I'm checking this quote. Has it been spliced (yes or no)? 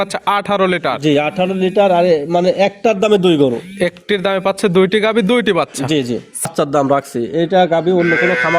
yes